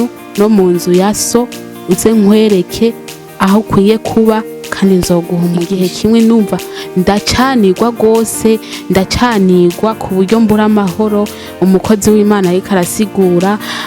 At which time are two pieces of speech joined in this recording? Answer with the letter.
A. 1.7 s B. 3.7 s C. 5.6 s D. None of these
C